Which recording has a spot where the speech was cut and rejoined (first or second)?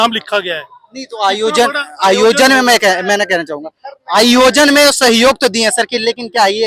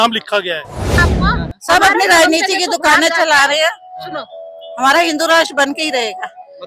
second